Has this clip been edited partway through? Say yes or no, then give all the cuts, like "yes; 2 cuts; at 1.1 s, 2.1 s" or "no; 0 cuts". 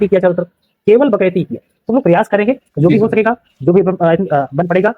yes; 1 cut; at 1.8 s